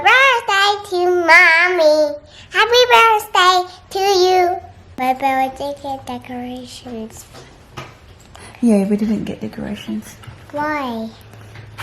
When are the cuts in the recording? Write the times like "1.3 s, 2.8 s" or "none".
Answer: 4.9 s